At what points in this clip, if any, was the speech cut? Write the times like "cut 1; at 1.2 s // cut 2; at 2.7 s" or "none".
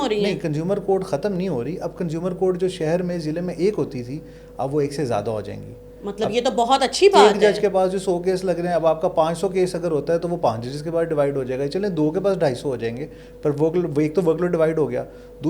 none